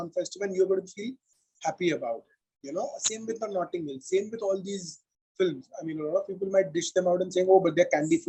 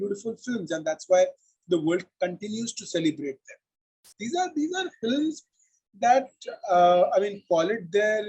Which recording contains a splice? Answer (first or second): second